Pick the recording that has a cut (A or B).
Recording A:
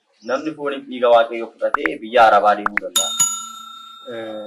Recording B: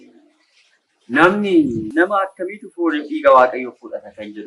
B